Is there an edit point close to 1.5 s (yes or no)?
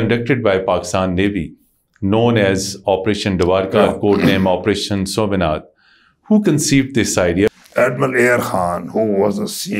no